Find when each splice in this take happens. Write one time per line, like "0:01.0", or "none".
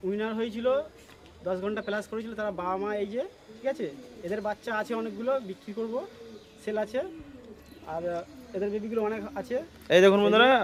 none